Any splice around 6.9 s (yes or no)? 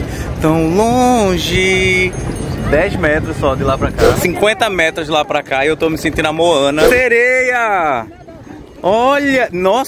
yes